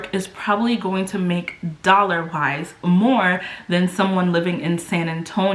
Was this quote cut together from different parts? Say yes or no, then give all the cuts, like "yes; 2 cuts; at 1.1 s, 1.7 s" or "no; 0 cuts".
no; 0 cuts